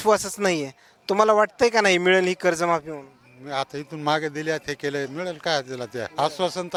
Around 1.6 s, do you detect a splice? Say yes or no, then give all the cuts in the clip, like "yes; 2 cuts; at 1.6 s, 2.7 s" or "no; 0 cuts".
no; 0 cuts